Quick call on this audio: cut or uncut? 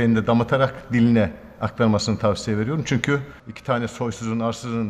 cut